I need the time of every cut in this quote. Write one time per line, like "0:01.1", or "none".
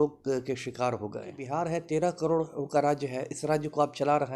0:01.4